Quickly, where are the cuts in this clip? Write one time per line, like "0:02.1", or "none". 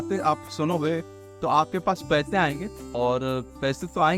0:02.8